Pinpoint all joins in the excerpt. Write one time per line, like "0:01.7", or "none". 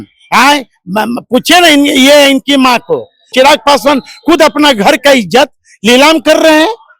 0:03.3

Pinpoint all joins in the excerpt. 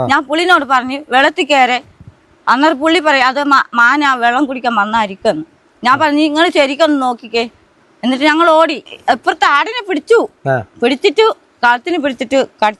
0:08.9

